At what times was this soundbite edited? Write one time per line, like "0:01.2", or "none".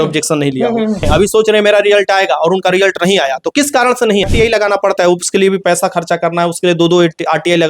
0:01.1
0:04.2